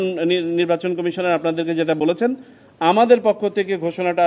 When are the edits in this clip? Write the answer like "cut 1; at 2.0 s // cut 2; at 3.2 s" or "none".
none